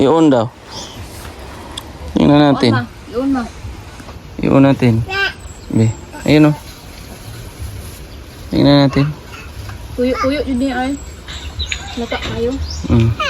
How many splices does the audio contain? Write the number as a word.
zero